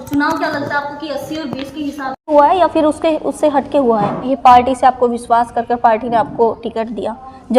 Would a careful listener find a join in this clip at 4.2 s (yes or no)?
yes